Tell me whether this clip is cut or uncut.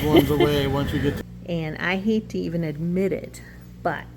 cut